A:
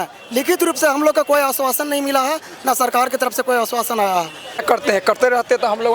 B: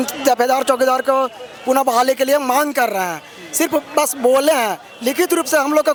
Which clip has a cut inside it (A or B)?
A